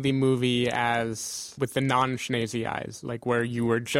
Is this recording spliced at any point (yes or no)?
yes